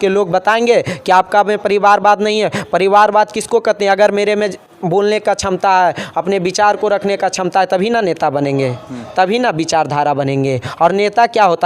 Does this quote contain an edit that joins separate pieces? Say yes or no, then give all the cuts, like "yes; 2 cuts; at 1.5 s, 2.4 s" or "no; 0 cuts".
no; 0 cuts